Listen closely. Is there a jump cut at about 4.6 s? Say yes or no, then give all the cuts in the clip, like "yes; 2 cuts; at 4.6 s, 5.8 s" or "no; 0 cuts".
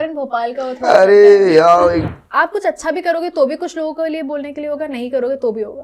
no; 1 cut; at 2.1 s